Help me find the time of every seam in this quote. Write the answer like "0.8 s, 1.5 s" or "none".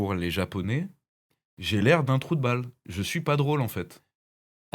none